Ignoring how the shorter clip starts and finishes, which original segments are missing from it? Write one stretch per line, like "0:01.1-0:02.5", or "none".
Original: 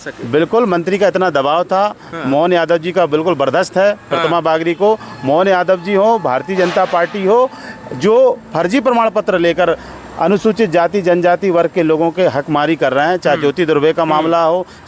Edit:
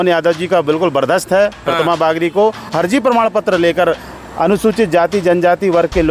0:05.1-0:08.5